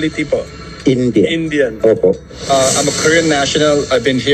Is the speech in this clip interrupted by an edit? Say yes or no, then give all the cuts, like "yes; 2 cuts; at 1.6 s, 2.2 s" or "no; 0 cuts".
yes; 1 cut; at 2.5 s